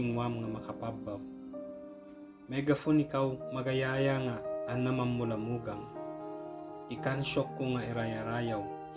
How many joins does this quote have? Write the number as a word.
two